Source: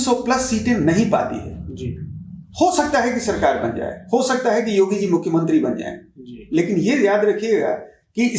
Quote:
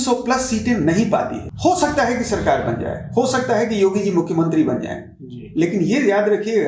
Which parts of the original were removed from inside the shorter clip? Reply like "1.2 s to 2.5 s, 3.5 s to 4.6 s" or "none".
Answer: 1.4 s to 2.4 s